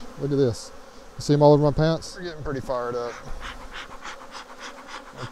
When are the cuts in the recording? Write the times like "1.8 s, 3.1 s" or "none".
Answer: 2.4 s